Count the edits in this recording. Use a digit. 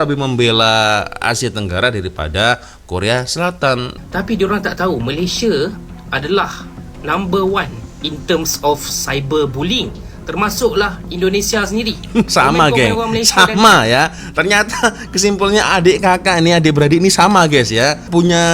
1